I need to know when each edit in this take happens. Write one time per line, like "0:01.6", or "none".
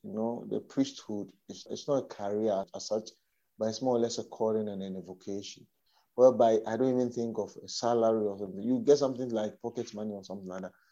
0:01.7
0:02.8